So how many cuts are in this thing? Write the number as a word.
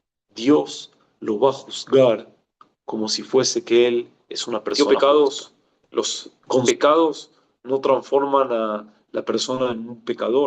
one